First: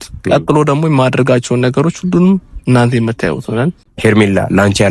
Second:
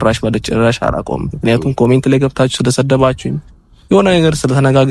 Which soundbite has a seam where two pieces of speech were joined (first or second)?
first